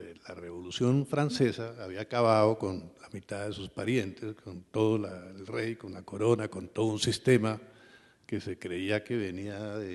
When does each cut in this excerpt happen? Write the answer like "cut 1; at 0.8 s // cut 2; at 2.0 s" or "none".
cut 1; at 2.0 s